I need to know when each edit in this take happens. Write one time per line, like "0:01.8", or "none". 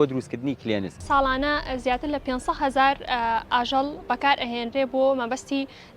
0:01.0